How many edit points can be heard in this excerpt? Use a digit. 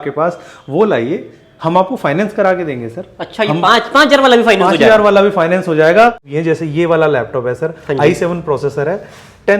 1